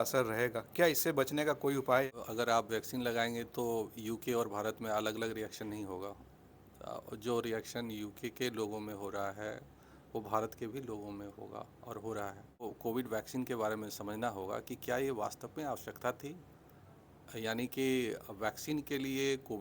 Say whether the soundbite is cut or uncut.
cut